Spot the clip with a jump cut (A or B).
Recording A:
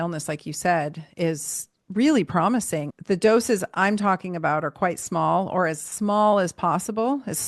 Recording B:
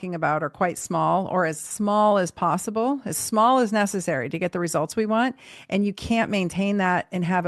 A